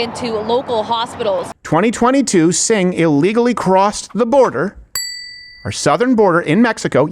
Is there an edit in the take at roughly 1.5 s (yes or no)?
yes